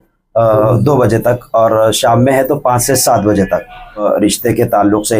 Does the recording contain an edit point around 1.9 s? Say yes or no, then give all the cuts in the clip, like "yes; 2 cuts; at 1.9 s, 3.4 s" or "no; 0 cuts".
no; 1 cut; at 4.0 s